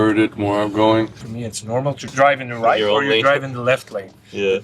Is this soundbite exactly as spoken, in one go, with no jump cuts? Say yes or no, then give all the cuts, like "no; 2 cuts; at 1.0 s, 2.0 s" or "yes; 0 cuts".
no; 1 cut; at 1.8 s